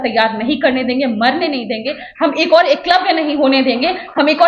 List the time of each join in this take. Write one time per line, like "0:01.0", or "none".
none